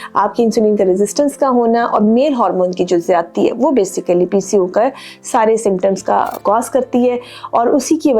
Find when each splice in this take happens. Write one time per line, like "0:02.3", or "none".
0:06.3